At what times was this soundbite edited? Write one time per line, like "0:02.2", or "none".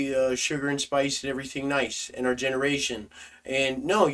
none